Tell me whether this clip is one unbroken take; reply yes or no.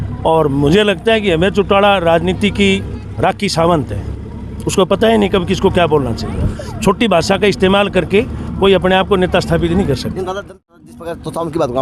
no